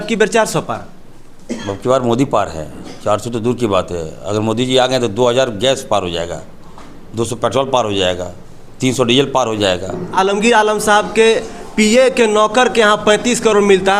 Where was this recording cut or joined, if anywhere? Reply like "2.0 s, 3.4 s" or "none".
10.1 s